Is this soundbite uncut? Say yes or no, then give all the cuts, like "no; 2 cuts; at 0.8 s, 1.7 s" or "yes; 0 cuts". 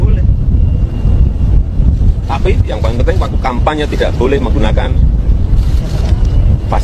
yes; 0 cuts